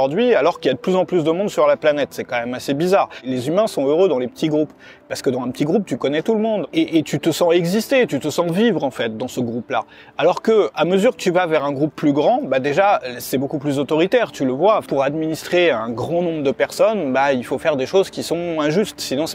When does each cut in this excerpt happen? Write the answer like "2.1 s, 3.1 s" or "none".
3.3 s, 6.6 s, 14.9 s